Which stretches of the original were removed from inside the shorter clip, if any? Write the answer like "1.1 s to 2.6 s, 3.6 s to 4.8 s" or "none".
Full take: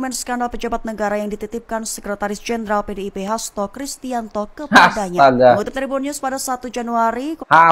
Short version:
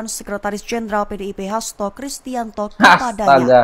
4.5 s to 4.6 s